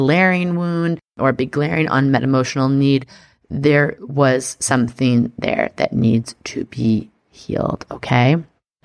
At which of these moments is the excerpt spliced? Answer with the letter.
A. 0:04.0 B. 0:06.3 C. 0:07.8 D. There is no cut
A